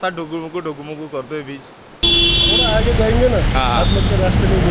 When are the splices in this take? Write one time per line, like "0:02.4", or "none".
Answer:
0:01.9